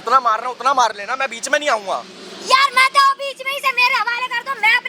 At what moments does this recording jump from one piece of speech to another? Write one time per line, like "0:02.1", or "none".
none